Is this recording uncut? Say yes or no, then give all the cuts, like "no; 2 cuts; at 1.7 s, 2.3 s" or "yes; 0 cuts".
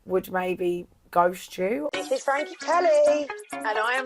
no; 1 cut; at 1.9 s